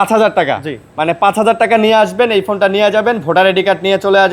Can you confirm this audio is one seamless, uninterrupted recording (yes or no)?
yes